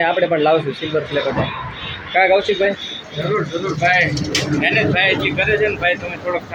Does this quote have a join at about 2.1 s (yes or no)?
no